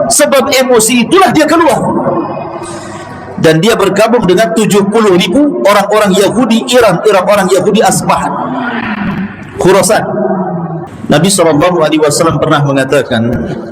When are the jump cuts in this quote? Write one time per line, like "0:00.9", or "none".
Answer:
0:10.8